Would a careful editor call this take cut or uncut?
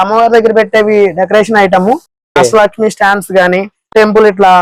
uncut